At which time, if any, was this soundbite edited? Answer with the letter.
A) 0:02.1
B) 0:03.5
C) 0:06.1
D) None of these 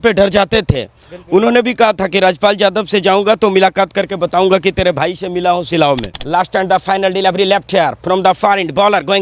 C